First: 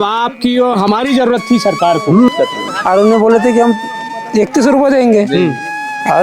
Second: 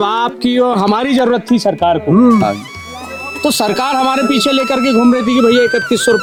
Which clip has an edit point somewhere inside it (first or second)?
first